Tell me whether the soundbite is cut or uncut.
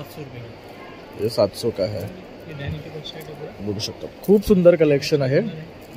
uncut